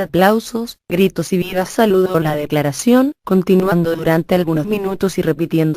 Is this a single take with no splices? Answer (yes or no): no